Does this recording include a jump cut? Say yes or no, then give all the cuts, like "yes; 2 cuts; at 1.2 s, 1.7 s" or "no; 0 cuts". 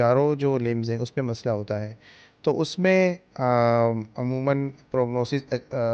no; 0 cuts